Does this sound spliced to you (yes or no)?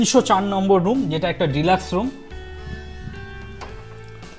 no